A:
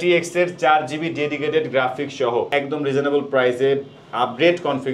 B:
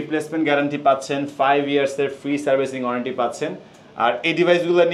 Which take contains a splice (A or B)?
A